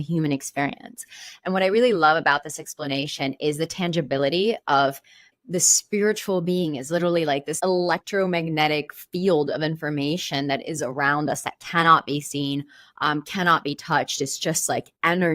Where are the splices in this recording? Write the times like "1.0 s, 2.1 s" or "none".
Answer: 5.3 s, 7.5 s